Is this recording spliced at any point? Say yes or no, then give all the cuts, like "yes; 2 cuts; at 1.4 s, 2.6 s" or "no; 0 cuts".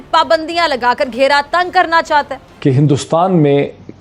yes; 1 cut; at 2.4 s